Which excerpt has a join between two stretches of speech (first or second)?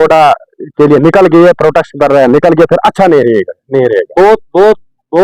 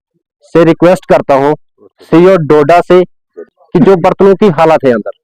second